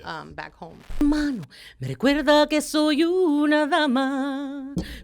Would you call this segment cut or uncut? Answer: cut